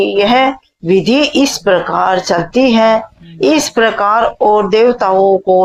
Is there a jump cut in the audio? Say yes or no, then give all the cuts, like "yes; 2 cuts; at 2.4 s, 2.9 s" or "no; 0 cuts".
no; 0 cuts